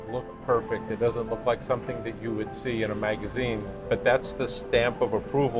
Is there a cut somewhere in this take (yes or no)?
no